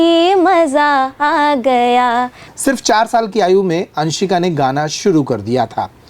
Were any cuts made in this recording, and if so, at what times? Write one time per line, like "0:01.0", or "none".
0:02.4